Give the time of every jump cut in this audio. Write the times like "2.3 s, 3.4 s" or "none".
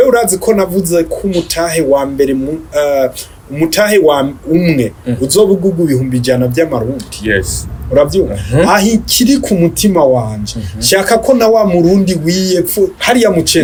none

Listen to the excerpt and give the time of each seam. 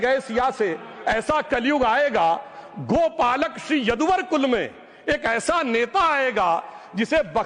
none

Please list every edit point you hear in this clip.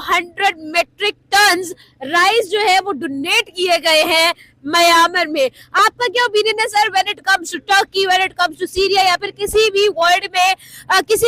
none

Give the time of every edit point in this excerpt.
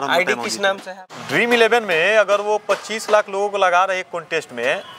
1.0 s

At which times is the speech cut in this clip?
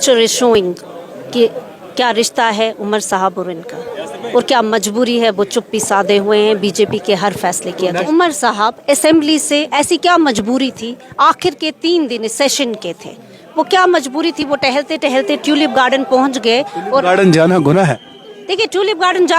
8.0 s

